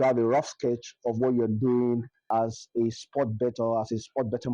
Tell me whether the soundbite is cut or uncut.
cut